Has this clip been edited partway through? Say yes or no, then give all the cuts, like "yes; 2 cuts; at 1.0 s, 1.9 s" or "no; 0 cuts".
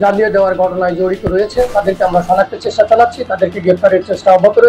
no; 0 cuts